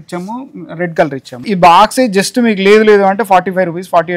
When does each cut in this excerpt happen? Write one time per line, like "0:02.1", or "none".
0:01.5

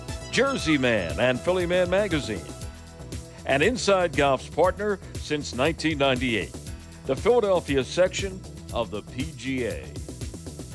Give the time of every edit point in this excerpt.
0:09.9

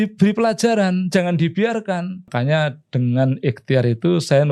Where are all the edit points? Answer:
0:02.3

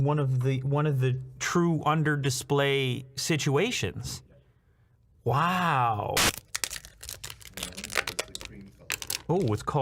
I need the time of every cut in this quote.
0:06.2

